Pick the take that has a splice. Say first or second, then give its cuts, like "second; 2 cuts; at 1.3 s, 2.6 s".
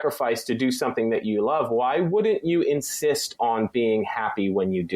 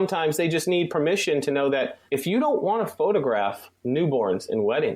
second; 2 cuts; at 2.0 s, 3.7 s